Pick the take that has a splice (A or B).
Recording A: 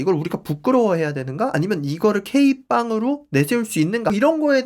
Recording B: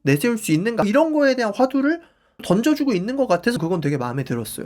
B